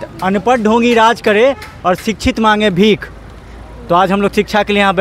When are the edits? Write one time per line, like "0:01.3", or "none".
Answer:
none